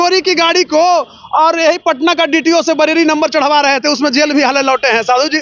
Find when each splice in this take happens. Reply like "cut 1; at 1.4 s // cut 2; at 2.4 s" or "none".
none